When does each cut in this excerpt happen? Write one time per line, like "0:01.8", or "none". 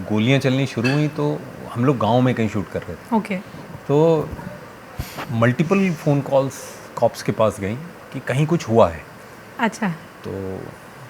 none